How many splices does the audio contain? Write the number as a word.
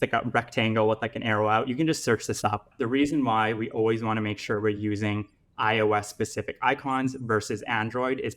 one